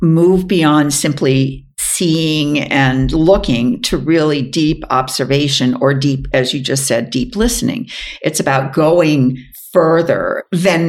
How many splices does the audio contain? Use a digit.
0